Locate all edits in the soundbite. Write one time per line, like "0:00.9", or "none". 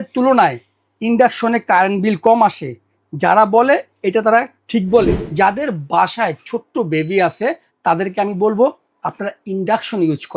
0:05.2